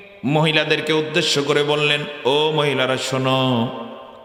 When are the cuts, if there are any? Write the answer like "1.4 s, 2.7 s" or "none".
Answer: none